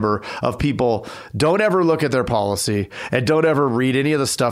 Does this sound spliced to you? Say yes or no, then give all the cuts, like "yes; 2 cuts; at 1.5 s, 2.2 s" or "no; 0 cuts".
no; 0 cuts